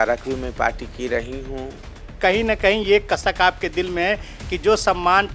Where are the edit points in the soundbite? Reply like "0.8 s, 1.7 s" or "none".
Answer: 2.2 s